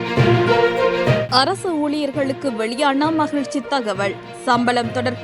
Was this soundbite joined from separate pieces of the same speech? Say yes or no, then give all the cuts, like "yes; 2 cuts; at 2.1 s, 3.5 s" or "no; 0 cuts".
yes; 1 cut; at 1.3 s